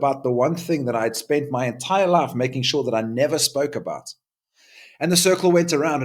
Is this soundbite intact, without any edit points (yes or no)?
yes